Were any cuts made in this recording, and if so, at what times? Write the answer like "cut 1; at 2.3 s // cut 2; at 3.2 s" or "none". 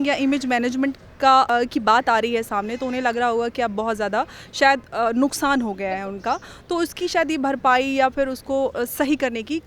cut 1; at 1.5 s

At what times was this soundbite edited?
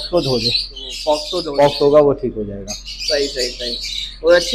cut 1; at 1.3 s

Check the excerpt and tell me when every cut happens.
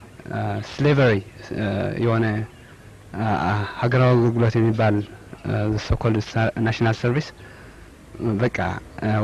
none

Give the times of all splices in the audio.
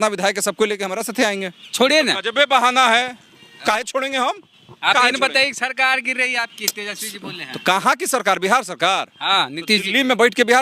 cut 1; at 1.7 s

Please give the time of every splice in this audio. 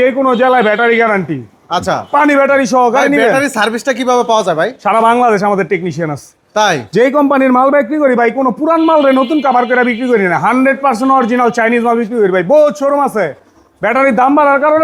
none

